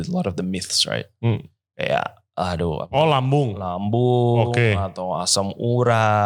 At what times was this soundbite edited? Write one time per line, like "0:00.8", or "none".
none